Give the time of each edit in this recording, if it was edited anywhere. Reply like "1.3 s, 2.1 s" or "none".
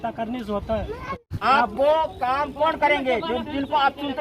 1.1 s

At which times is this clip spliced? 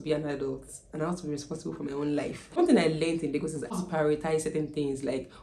2.6 s, 3.8 s

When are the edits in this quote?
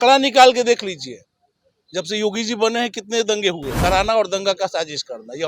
3.7 s

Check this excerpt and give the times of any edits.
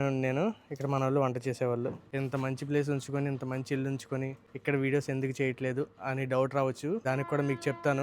2.0 s, 4.4 s, 7.0 s

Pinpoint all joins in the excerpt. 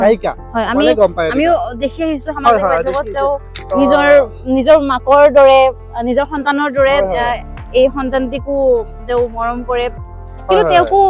none

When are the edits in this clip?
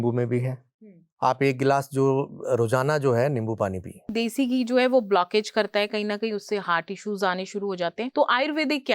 4.1 s, 8.0 s

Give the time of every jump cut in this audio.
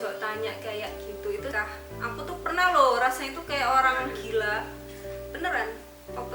1.5 s

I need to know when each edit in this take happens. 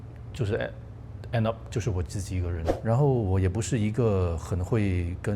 2.6 s

